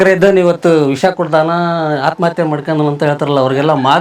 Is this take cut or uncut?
uncut